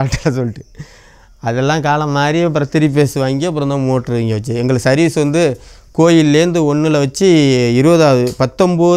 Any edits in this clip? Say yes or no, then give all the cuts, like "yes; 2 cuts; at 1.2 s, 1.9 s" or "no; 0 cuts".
no; 0 cuts